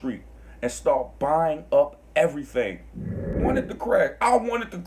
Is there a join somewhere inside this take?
yes; 1 cut; at 3.4 s

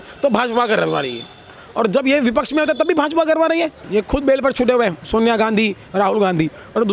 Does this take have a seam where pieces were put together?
yes; 1 cut; at 3.8 s

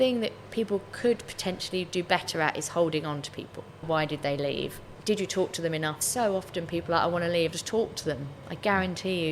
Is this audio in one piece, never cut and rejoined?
no; 4 cuts; at 3.8 s, 4.9 s, 6.0 s, 7.5 s

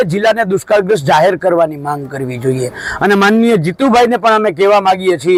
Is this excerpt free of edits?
yes; 0 cuts

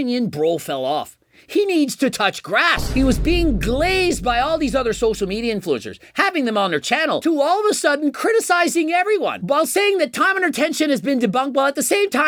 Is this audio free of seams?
yes; 0 cuts

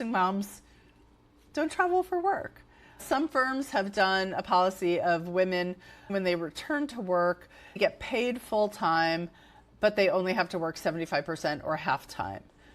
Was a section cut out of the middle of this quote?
yes; 2 cuts; at 3.0 s, 6.1 s

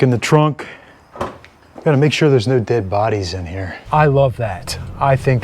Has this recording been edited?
yes; 2 cuts; at 1.5 s, 3.7 s

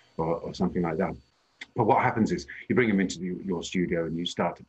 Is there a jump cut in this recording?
yes; 1 cut; at 1.2 s

